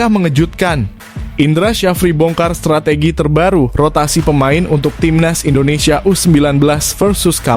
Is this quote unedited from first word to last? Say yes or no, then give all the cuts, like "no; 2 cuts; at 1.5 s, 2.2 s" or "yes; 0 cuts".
yes; 0 cuts